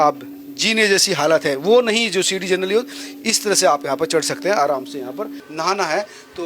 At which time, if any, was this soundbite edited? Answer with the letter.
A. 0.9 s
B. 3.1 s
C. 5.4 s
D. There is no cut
C